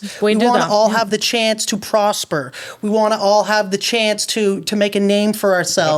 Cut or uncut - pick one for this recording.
uncut